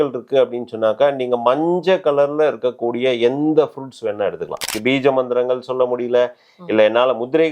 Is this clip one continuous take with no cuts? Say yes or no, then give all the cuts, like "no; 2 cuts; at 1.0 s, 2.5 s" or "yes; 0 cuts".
no; 1 cut; at 4.7 s